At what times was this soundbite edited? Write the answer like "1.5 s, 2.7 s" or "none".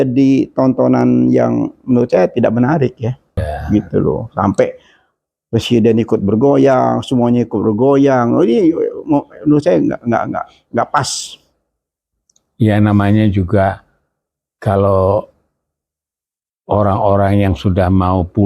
3.5 s